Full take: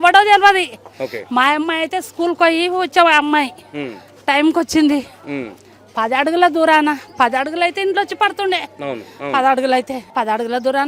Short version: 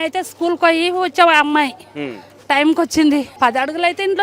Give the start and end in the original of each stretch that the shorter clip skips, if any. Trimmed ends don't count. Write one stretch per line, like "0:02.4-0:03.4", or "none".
0:05.1-0:07.1

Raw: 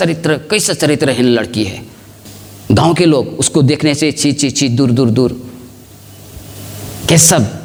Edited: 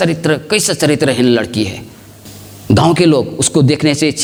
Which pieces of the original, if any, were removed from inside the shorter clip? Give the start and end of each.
none

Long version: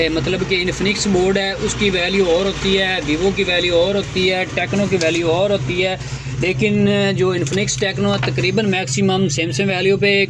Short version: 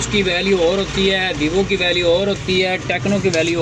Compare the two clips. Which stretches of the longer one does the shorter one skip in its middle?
none

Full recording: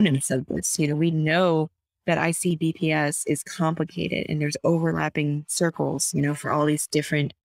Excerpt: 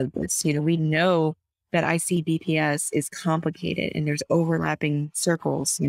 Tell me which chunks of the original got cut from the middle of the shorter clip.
none

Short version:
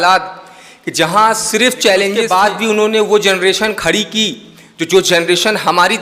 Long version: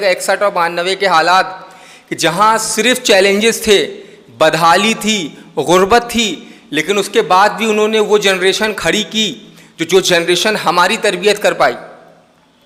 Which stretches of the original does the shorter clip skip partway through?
0:03.4-0:07.2

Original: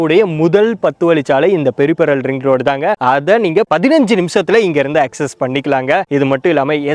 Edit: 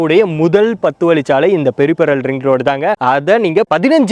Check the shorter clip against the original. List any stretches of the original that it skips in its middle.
none

